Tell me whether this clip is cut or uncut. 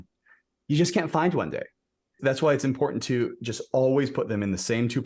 uncut